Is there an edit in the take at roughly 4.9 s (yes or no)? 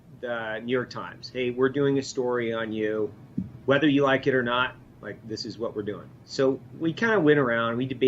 no